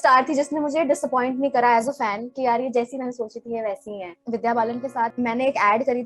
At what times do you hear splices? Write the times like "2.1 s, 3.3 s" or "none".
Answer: 4.1 s, 5.1 s